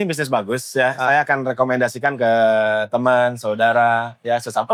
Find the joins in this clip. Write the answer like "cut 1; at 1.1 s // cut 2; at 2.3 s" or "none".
none